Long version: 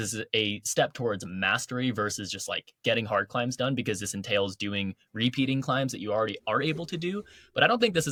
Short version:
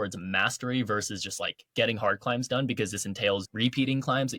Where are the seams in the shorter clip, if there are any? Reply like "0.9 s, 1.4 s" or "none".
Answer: 3.5 s